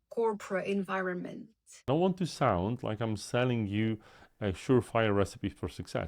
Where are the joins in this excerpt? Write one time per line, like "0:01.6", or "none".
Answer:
0:01.9